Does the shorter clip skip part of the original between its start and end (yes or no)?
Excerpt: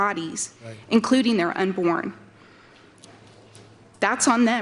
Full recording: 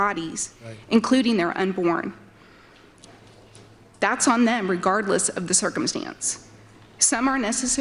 no